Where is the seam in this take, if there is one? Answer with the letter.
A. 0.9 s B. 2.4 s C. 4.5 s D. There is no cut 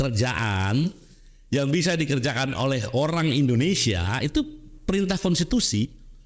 D